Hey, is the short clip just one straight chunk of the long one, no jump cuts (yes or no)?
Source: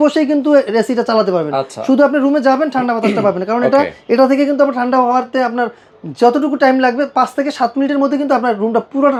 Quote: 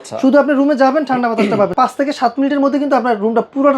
no